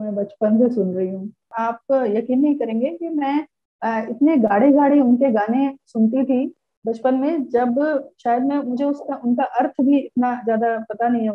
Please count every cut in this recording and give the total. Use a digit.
1